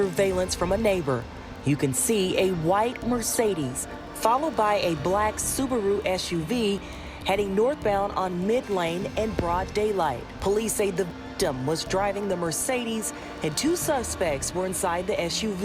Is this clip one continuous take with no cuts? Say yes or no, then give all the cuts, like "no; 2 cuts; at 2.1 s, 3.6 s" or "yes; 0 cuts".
yes; 0 cuts